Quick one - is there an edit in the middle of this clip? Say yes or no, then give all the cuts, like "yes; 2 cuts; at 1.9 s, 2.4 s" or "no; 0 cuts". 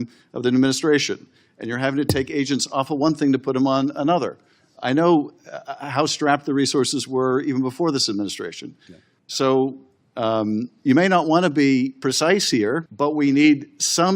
yes; 1 cut; at 12.9 s